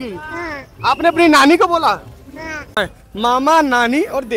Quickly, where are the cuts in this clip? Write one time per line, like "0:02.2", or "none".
0:02.8